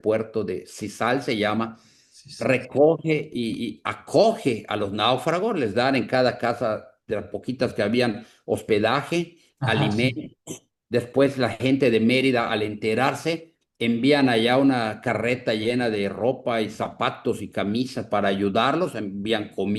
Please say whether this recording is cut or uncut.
uncut